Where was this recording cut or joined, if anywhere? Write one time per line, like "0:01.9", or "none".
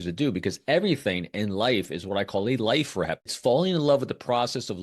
0:03.3